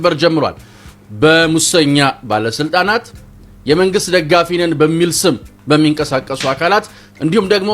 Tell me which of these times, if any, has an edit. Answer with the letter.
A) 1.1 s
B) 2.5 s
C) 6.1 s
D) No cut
D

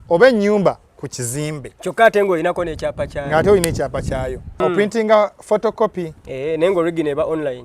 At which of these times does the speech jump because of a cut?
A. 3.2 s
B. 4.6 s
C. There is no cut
B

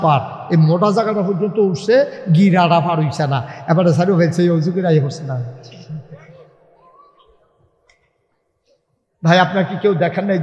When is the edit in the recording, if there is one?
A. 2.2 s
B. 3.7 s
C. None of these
C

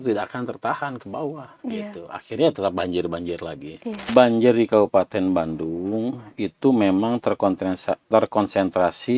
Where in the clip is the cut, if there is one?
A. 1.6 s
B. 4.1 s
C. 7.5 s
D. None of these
B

